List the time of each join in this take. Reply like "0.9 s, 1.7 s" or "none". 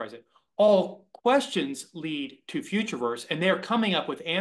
none